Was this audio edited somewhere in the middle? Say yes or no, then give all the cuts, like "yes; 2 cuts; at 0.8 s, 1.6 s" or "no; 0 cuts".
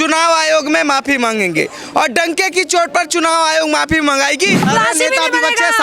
yes; 1 cut; at 4.7 s